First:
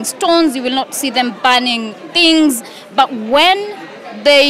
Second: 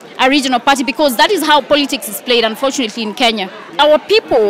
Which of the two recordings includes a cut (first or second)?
second